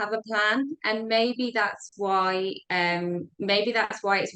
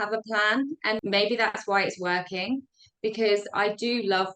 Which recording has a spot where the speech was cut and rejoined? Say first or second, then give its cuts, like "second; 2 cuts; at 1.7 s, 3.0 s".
second; 1 cut; at 1.0 s